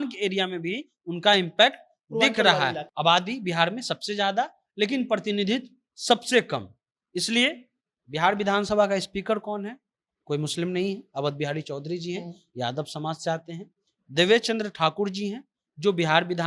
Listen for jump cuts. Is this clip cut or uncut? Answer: cut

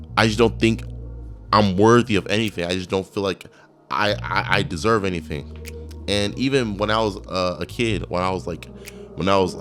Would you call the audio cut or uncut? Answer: uncut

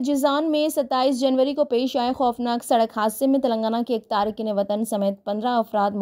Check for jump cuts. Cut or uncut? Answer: uncut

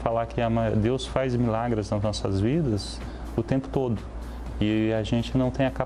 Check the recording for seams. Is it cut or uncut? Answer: uncut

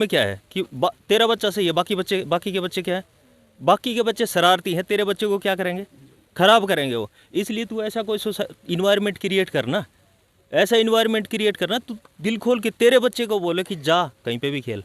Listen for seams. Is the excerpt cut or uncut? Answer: uncut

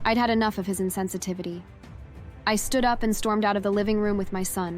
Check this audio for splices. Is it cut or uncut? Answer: uncut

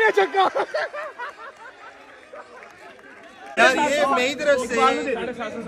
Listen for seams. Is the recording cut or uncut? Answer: cut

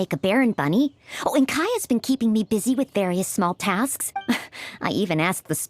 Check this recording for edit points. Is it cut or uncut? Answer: cut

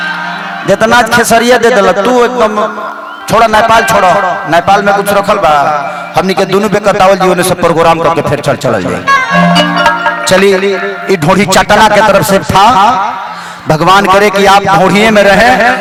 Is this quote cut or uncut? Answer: uncut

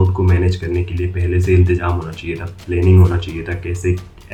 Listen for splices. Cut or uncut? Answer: uncut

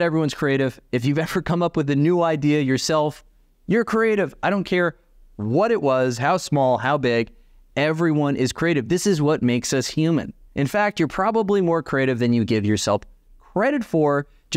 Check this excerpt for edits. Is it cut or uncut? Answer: uncut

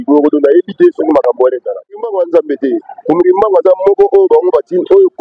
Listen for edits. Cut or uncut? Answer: cut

